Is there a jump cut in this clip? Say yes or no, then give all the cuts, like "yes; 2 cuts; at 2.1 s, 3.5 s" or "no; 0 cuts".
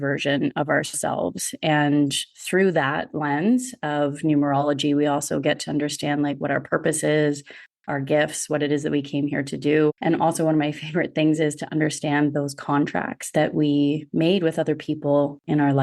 yes; 1 cut; at 10.0 s